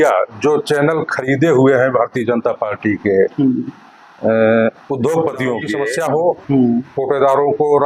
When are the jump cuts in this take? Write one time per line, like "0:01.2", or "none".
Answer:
0:05.7